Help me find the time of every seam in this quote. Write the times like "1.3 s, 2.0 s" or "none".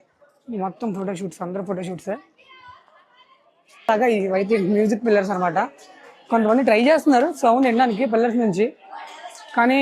3.9 s